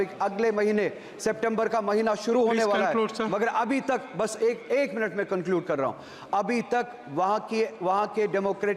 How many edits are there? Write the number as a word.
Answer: zero